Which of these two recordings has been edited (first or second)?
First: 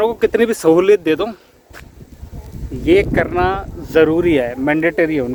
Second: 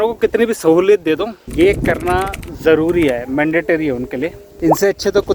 second